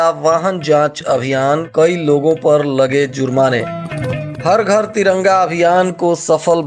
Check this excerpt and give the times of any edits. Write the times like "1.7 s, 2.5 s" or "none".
none